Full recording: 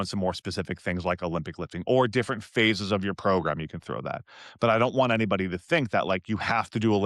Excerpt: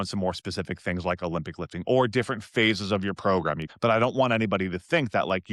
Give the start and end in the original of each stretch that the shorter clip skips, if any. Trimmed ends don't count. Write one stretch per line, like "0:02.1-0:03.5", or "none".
0:03.7-0:04.5